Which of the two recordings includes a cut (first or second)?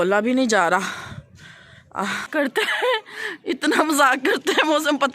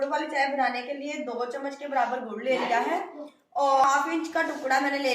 first